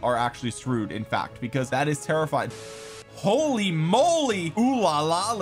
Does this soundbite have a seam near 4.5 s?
yes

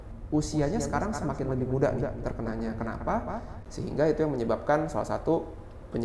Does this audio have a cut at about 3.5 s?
yes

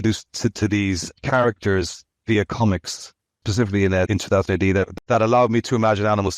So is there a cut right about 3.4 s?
yes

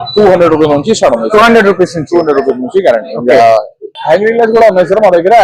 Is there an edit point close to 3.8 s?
yes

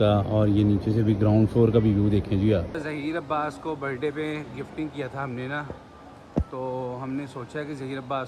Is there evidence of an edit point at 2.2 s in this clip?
no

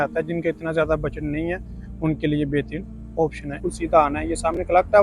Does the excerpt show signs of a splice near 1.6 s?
no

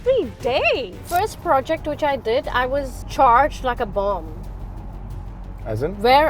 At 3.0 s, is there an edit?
yes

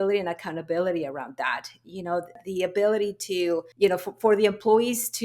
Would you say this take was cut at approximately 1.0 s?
no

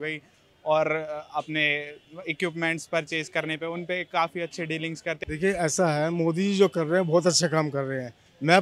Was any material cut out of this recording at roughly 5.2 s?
yes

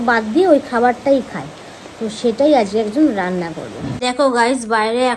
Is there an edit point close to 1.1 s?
no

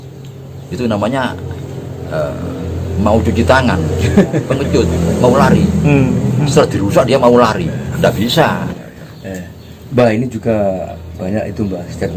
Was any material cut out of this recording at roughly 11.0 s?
no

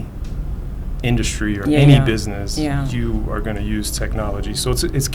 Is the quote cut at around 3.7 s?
no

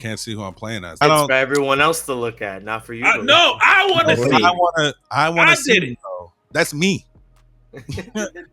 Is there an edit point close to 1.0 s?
yes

